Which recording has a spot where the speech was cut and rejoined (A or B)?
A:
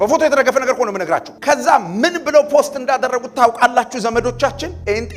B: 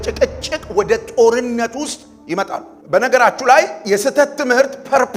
B